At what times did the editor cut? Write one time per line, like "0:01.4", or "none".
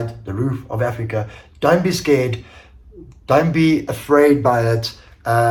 none